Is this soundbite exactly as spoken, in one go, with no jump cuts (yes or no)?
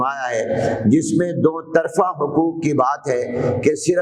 yes